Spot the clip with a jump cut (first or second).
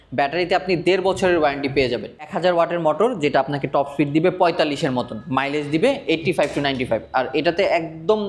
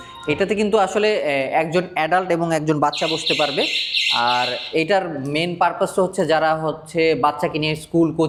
first